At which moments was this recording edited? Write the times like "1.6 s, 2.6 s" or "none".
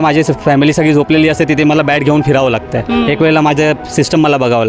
none